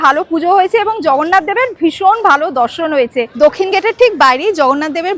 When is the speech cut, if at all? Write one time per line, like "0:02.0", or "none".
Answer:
0:03.3